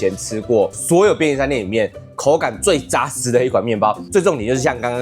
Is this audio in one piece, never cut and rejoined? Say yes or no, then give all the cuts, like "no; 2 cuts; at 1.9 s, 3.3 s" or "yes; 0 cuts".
no; 1 cut; at 4.0 s